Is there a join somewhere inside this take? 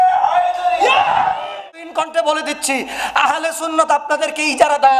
yes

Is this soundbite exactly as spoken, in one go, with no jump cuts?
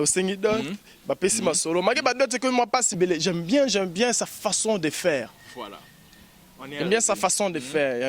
no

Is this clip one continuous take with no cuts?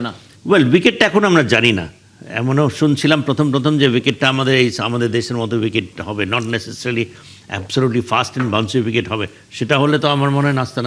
yes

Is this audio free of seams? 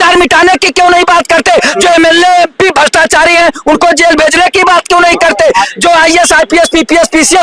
yes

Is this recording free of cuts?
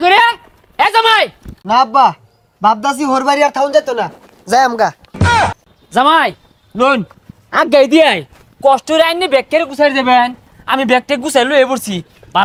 yes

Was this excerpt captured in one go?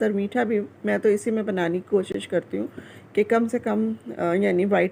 yes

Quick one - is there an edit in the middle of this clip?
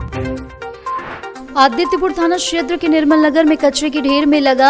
no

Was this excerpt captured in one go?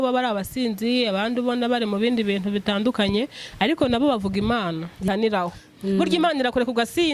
no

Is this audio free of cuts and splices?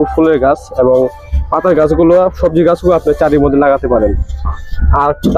yes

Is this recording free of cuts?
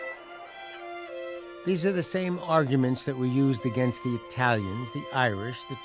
no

